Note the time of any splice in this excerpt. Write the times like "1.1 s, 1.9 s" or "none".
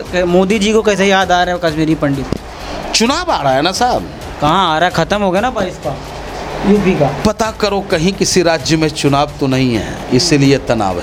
none